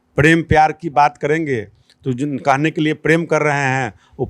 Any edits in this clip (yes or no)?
no